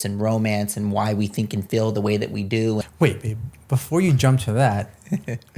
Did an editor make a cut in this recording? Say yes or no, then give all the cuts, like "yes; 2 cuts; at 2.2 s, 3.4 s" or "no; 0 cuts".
yes; 1 cut; at 2.8 s